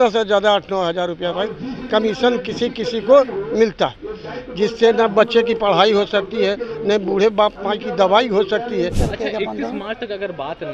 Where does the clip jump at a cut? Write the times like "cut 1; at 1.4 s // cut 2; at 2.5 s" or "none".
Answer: cut 1; at 9.0 s